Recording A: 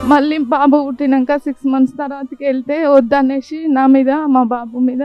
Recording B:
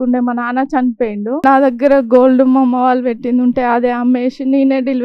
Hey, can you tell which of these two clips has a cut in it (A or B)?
B